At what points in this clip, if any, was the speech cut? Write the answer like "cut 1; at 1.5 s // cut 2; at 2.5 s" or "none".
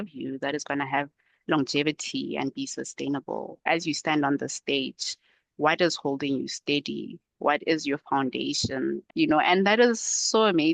cut 1; at 3.6 s // cut 2; at 9.0 s